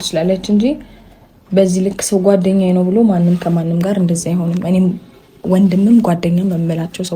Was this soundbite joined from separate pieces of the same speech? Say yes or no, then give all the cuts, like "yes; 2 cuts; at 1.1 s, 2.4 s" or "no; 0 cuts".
no; 0 cuts